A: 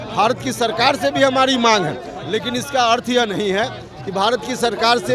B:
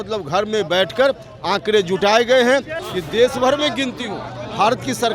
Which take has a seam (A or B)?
B